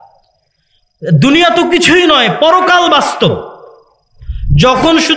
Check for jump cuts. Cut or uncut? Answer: uncut